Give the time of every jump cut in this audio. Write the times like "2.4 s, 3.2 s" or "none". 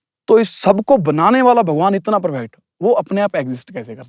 none